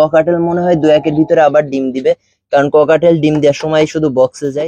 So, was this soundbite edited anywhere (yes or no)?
no